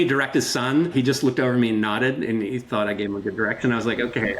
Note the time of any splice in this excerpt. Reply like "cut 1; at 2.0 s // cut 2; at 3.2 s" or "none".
cut 1; at 0.9 s